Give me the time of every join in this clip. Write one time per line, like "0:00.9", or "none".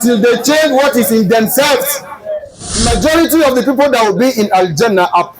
0:02.8